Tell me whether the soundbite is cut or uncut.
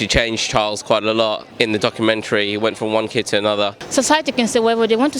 cut